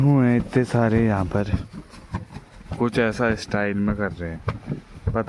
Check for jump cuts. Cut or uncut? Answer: uncut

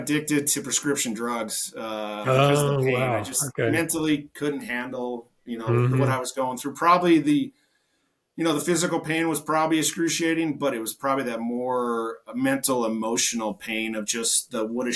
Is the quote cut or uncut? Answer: uncut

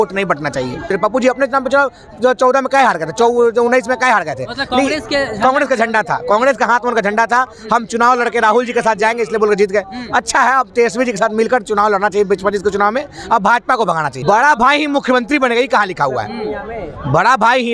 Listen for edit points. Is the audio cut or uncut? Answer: cut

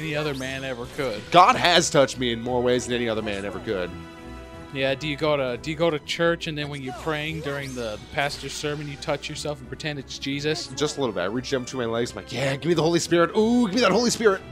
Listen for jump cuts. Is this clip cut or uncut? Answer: uncut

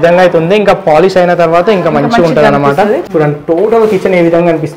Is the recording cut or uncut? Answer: cut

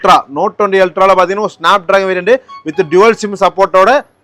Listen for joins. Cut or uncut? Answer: uncut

